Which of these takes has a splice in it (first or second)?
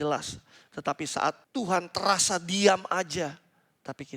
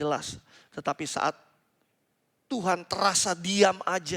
first